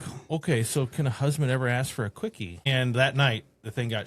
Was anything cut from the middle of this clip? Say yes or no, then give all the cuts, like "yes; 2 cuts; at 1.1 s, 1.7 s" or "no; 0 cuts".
yes; 1 cut; at 2.7 s